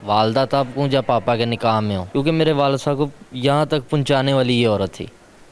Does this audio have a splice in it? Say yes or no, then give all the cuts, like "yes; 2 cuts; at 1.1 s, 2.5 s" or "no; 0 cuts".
yes; 1 cut; at 2.0 s